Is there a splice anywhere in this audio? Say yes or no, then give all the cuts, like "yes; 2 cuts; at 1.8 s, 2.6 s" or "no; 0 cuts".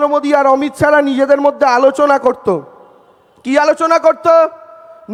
no; 0 cuts